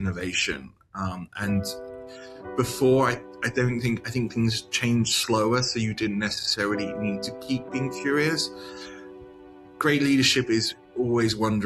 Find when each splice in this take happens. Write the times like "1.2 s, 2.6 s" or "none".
10.7 s